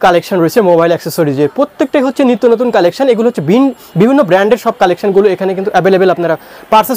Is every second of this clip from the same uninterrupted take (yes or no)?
yes